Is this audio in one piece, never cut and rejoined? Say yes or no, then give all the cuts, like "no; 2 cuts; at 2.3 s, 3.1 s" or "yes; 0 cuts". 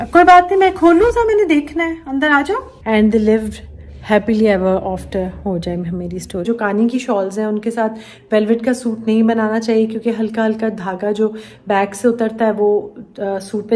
no; 2 cuts; at 2.7 s, 6.4 s